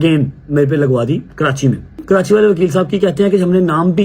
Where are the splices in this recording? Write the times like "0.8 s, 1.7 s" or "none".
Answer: 2.0 s